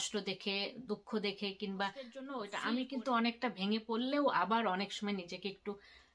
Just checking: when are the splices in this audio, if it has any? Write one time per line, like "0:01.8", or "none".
0:02.5